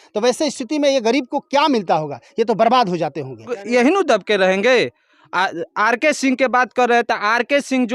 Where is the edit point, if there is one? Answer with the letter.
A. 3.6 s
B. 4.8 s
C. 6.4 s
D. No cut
A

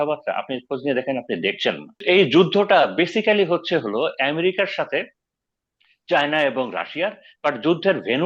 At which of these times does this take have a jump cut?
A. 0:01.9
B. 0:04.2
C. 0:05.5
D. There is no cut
A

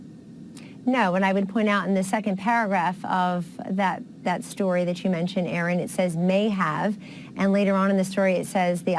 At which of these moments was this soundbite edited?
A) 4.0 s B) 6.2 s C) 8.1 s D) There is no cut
C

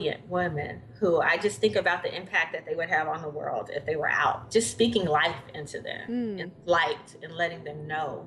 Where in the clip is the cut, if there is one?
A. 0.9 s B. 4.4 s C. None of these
B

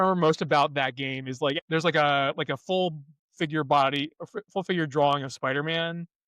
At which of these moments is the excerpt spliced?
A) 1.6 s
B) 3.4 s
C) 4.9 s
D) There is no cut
A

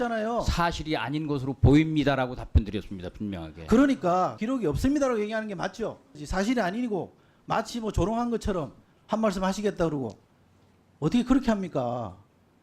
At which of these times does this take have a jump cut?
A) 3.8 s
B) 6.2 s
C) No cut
B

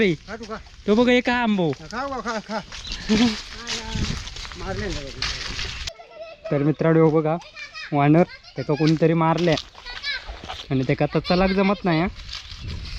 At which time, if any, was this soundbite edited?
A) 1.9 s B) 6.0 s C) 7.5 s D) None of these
D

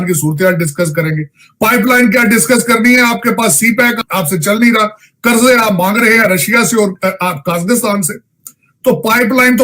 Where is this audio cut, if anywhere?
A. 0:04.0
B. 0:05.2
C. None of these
A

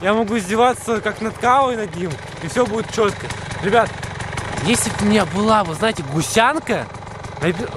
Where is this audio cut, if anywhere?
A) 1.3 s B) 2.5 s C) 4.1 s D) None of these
D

